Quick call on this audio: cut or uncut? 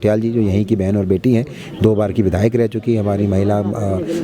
uncut